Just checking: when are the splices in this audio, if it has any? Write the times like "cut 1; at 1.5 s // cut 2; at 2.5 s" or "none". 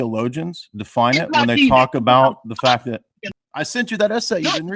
cut 1; at 3.2 s